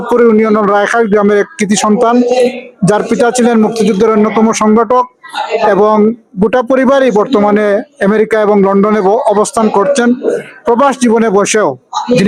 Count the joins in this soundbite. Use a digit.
0